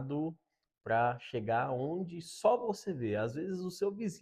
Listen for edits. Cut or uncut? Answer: uncut